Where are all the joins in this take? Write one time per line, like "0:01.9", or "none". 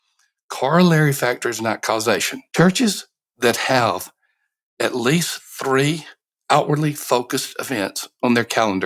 0:02.4